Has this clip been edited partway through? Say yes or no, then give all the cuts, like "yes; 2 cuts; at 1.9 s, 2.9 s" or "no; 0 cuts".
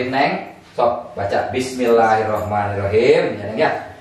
no; 0 cuts